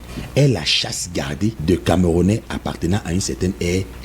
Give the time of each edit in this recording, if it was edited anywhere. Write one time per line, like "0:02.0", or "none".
0:01.6